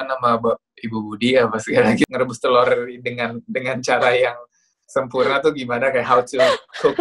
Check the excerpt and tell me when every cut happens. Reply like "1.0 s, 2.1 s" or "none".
2.0 s